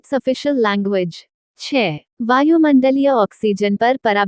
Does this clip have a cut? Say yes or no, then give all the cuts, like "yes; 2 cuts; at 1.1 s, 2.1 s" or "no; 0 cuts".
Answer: yes; 1 cut; at 1.7 s